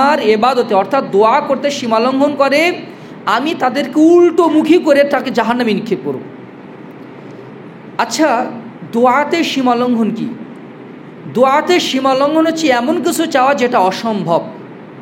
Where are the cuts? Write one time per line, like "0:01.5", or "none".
none